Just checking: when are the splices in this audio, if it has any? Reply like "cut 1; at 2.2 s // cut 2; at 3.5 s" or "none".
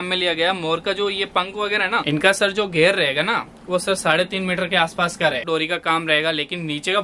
cut 1; at 2.0 s // cut 2; at 5.4 s